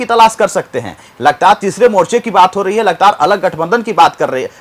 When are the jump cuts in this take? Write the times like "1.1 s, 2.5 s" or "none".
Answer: none